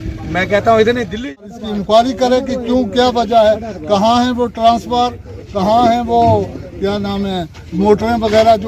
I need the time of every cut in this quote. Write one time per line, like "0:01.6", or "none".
0:01.2